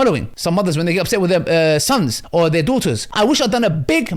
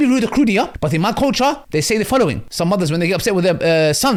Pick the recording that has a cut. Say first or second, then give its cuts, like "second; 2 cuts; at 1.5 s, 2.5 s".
first; 1 cut; at 3.1 s